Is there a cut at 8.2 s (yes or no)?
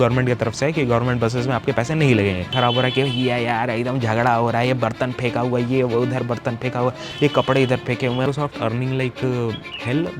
yes